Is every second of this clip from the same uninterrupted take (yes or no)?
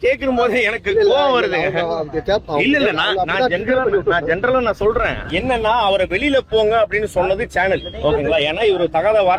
yes